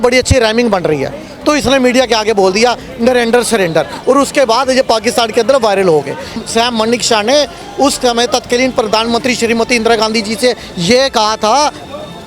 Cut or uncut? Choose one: cut